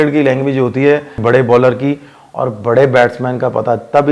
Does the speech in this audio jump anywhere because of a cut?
yes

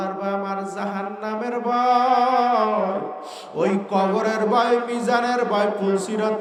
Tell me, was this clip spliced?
no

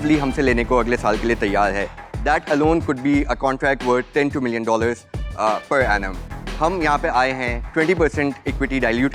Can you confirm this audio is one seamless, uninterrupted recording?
yes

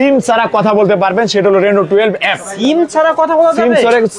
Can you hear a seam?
no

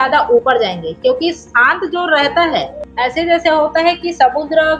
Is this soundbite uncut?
no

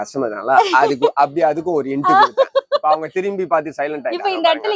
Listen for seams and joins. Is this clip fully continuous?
yes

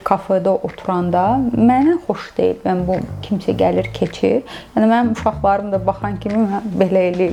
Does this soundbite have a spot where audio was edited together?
no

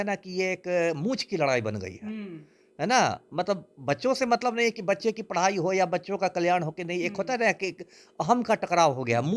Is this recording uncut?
yes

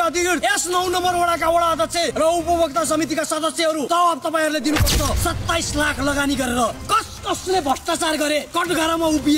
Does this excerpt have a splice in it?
yes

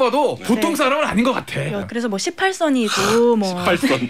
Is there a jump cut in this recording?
yes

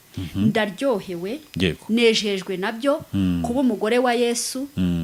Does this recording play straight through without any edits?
yes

